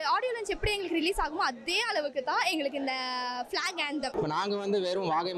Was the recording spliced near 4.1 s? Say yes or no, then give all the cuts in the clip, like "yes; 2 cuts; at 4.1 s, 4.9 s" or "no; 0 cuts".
yes; 1 cut; at 4.1 s